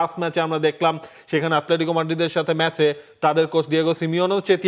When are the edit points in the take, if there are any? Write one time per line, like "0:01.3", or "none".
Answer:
none